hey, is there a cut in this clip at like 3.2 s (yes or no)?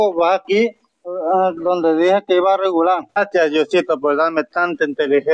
yes